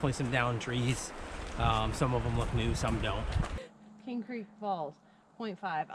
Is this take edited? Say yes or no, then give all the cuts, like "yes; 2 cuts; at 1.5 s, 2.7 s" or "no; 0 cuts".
yes; 1 cut; at 3.6 s